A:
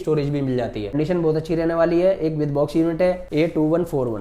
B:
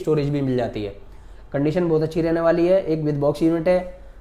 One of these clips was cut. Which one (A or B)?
A